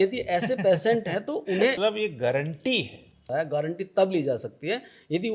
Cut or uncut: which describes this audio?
cut